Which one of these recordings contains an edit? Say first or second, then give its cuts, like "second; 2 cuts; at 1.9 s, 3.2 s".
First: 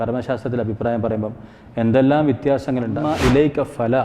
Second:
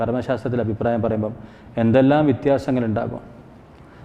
first; 1 cut; at 3.0 s